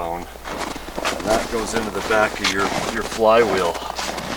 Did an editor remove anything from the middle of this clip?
no; 0 cuts

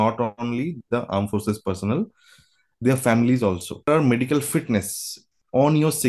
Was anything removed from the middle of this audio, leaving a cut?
yes; 1 cut; at 3.9 s

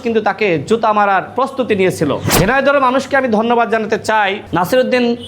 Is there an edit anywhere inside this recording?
yes; 3 cuts; at 1.3 s, 2.3 s, 4.4 s

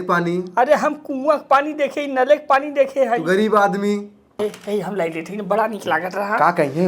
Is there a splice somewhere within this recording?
yes; 1 cut; at 4.4 s

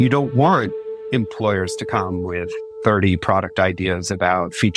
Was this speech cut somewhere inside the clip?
yes; 1 cut; at 2.6 s

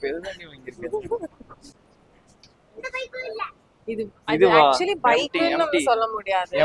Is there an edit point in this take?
no; 0 cuts

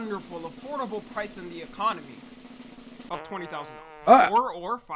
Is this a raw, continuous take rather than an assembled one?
yes; 0 cuts

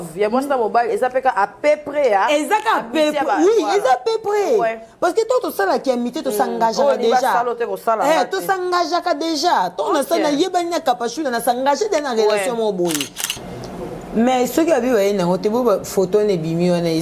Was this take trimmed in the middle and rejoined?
yes; 1 cut; at 13.2 s

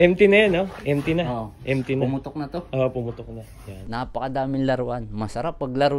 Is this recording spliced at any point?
yes; 1 cut; at 3.8 s

